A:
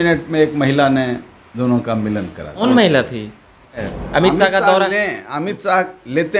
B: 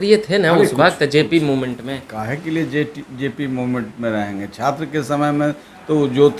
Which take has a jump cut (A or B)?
A